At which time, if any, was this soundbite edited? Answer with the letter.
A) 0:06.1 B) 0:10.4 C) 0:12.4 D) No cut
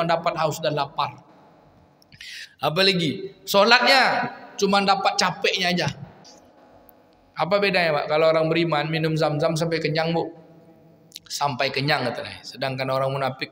A